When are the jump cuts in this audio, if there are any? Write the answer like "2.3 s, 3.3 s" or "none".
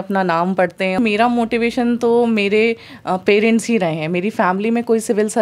1.0 s